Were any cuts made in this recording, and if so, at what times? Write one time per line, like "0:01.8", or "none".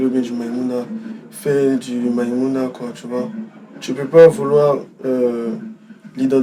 none